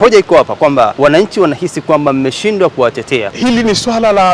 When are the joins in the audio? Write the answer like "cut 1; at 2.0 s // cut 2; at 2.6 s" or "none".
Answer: cut 1; at 0.9 s // cut 2; at 3.3 s